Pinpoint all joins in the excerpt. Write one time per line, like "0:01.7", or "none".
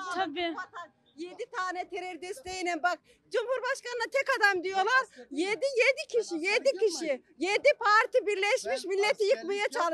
none